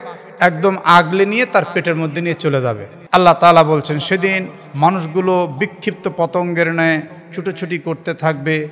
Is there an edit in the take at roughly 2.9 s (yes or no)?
yes